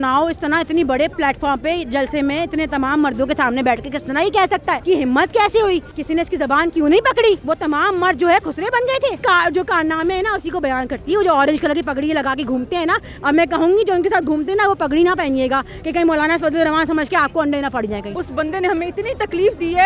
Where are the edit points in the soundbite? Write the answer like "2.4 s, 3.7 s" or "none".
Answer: 4.8 s, 5.9 s, 7.4 s, 9.2 s, 18.1 s